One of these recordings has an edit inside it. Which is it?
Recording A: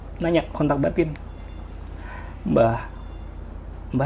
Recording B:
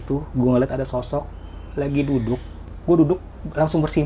B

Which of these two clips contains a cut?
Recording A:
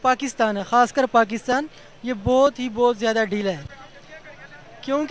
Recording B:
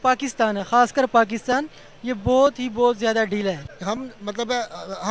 B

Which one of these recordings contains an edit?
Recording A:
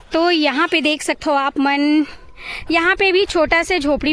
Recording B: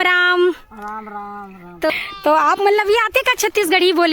B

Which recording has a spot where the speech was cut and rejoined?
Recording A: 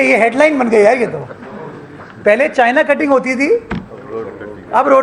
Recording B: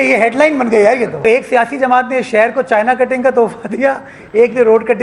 B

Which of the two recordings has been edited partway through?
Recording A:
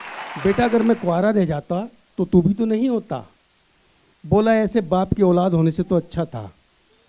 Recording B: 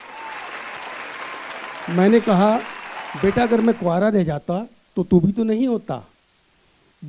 B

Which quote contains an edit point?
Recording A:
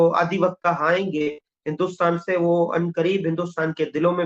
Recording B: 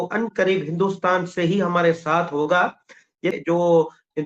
B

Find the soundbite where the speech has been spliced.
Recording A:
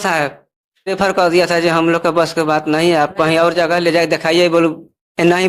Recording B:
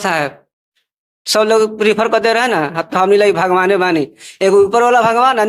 A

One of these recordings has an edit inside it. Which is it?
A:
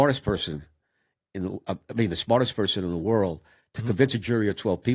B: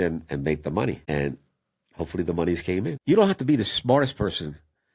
B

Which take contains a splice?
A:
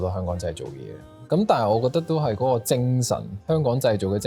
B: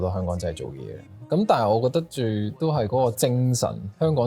A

